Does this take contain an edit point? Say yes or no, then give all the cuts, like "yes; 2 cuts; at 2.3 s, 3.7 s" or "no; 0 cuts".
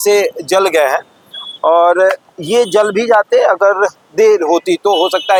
no; 0 cuts